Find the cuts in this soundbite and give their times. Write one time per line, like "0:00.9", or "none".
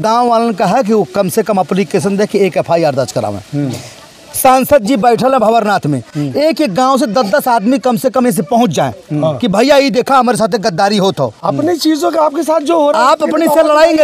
none

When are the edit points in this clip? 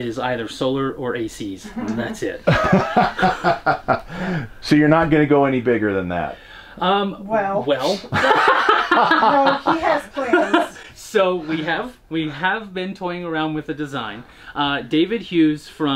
none

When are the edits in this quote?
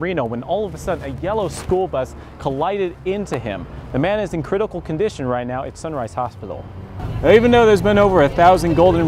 0:06.9

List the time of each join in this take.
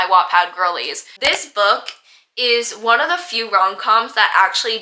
0:01.1

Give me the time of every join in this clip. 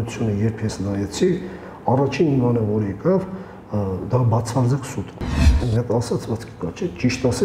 0:05.4

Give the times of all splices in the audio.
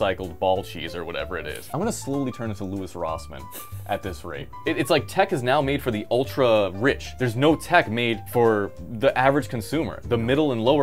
0:01.6
0:04.5
0:07.1
0:08.5

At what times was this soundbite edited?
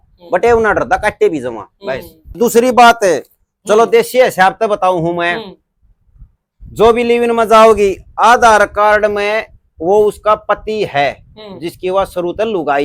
0:02.3

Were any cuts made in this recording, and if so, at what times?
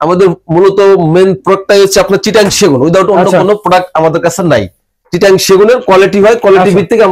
none

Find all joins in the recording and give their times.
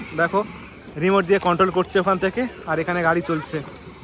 none

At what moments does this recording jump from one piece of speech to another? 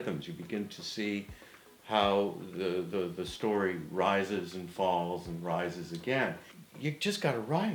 0:06.5

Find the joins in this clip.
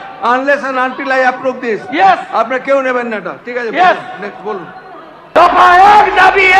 0:05.3

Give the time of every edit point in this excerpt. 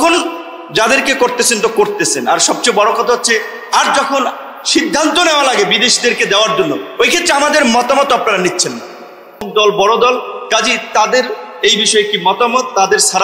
0:09.5

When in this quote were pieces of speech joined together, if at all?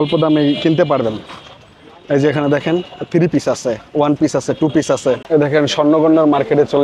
0:05.2

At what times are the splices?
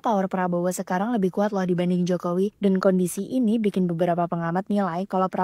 none

